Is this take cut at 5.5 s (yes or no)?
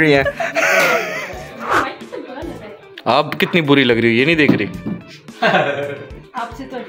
no